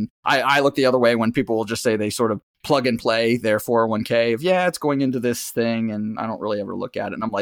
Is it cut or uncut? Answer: uncut